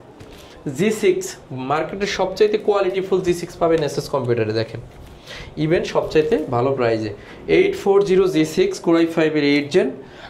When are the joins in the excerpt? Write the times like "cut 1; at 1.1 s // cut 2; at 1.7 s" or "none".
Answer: none